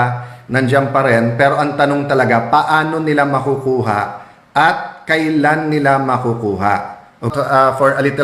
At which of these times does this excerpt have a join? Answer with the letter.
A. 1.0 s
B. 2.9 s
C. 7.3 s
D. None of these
C